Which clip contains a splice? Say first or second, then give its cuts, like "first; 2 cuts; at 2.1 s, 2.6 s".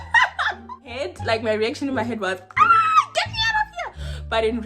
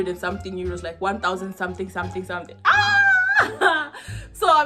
first; 1 cut; at 1.0 s